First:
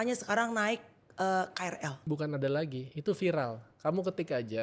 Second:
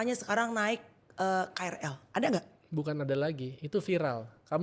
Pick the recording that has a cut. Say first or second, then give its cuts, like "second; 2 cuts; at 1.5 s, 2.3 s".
first; 1 cut; at 1.9 s